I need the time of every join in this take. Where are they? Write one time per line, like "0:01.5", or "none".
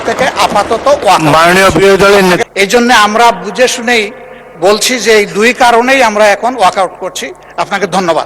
0:02.4